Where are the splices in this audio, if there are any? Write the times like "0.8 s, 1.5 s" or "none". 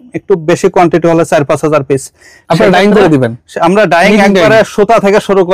none